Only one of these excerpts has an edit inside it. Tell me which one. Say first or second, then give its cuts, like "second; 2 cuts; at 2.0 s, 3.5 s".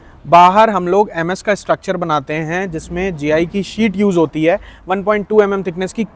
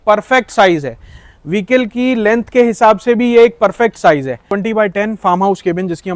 second; 1 cut; at 4.5 s